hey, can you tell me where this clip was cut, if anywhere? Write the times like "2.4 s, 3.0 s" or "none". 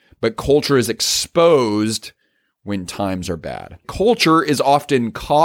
3.9 s

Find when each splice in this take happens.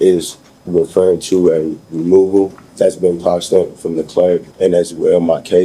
2.6 s, 4.5 s

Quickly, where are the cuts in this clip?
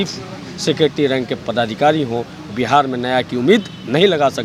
none

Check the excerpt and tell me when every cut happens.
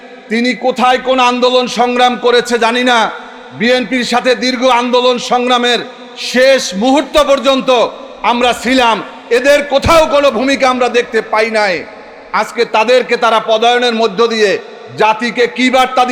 none

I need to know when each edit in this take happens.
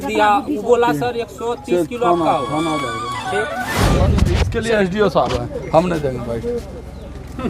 4.1 s

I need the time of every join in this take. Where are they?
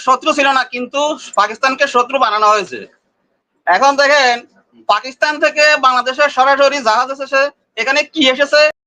none

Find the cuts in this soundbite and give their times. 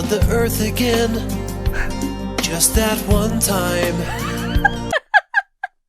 4.9 s

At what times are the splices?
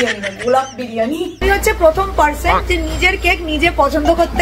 1.3 s

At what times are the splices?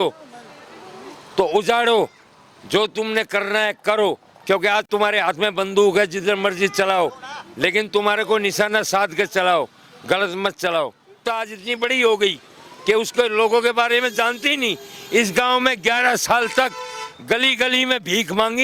11.2 s

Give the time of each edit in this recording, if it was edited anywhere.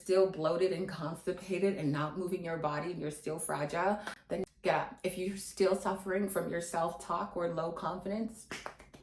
4.4 s

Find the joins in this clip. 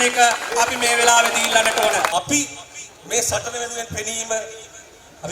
2.1 s

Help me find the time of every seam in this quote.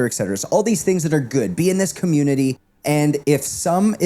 2.7 s

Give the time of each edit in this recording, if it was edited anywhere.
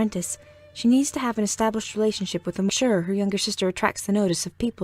none

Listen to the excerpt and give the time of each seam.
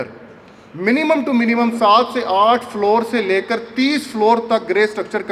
none

